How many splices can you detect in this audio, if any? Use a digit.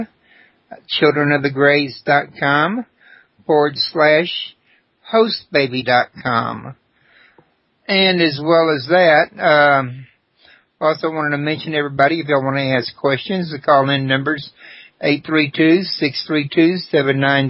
1